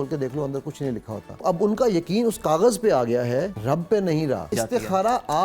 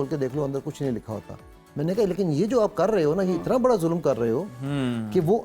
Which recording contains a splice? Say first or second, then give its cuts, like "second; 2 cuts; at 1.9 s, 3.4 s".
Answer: first; 3 cuts; at 1.4 s, 3.6 s, 4.5 s